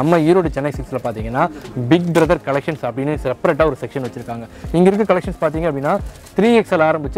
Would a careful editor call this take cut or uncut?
uncut